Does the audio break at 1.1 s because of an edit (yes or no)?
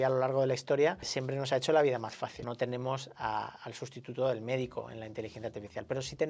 yes